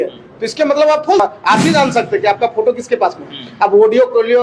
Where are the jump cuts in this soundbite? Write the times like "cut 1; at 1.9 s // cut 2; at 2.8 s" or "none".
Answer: cut 1; at 1.2 s